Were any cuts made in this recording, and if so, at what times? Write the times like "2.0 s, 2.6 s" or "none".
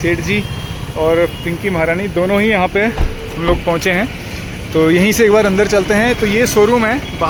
none